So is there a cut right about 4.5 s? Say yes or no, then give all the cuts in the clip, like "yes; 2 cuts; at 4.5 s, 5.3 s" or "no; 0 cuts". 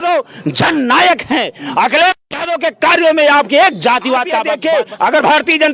yes; 1 cut; at 4.5 s